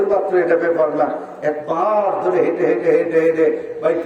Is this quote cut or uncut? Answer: uncut